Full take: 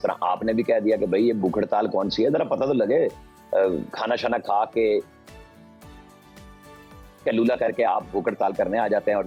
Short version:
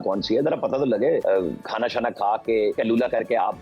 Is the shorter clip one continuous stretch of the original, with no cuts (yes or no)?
no